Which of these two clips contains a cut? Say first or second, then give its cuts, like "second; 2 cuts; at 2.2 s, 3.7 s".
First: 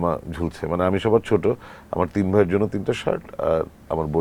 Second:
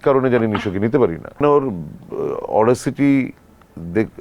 second; 1 cut; at 1.4 s